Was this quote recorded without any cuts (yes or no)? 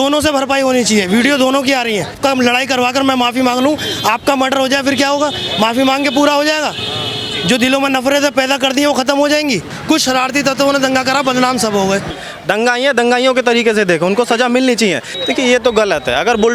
no